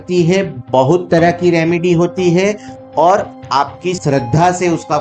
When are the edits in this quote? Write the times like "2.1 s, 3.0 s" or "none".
4.0 s

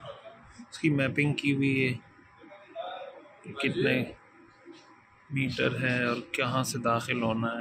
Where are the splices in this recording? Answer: none

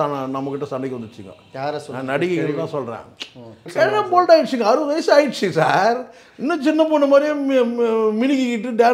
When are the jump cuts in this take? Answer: 3.7 s

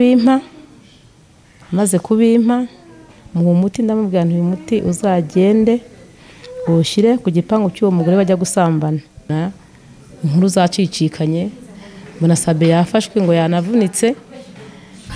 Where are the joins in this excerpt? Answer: 9.3 s

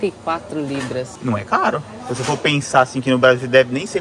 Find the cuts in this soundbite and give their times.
1.1 s

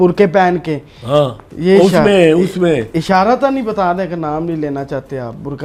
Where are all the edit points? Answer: none

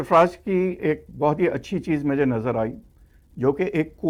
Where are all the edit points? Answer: none

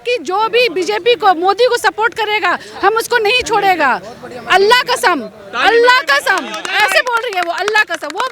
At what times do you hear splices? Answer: none

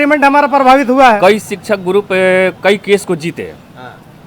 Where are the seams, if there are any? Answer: 1.2 s

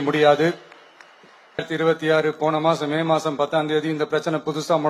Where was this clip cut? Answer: 1.7 s

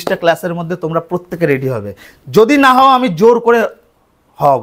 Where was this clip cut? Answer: none

